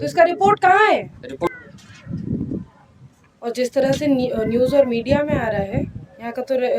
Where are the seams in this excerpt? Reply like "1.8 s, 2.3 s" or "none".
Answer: 1.5 s

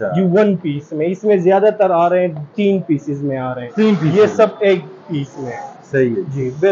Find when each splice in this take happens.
none

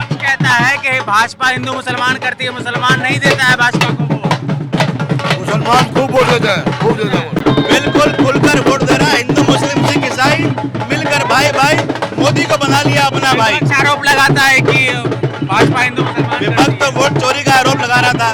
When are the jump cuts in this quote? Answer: 7.4 s

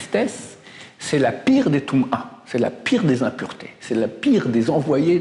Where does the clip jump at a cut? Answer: none

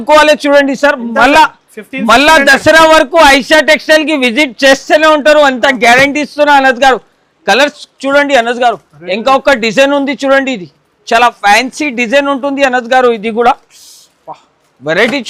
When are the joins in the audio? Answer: none

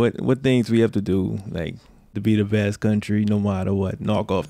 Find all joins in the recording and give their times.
2.2 s

